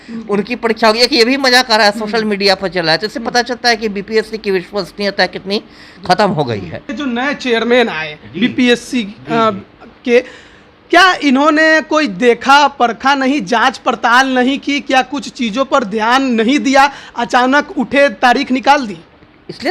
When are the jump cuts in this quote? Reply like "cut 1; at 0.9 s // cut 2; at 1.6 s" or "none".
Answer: cut 1; at 6.9 s